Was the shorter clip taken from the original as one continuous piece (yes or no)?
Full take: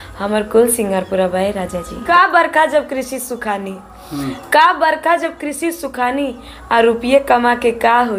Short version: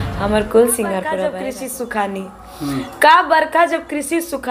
no